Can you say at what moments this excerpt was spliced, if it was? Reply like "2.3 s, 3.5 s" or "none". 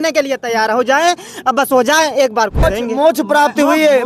2.6 s